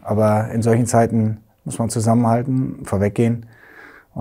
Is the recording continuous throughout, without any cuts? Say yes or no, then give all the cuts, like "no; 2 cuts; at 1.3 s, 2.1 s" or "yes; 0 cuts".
yes; 0 cuts